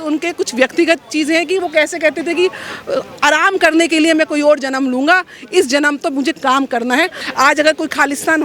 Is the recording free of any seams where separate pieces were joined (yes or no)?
no